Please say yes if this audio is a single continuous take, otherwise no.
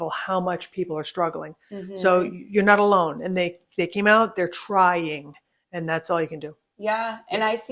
yes